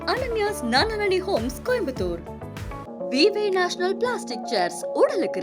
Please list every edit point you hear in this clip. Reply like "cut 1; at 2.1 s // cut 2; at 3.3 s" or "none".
none